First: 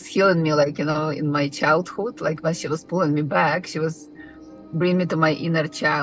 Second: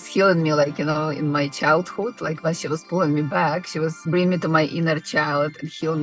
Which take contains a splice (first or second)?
second